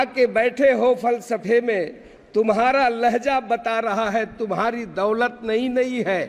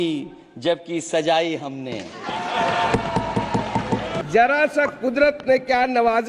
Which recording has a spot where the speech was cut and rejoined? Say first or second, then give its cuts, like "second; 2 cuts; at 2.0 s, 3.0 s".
second; 1 cut; at 4.2 s